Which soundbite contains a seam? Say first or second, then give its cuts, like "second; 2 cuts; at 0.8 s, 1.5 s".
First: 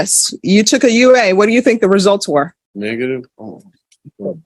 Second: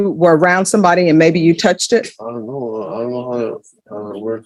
first; 1 cut; at 2.6 s